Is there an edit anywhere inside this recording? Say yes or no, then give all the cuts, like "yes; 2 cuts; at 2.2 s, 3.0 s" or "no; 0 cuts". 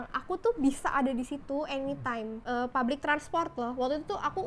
yes; 1 cut; at 2.4 s